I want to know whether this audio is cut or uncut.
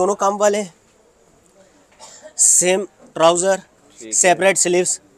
uncut